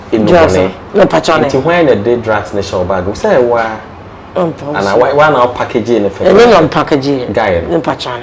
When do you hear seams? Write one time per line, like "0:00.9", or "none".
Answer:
none